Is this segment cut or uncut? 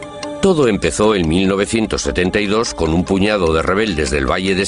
cut